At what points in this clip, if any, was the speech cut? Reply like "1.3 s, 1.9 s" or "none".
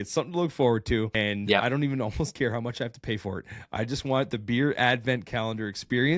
1.5 s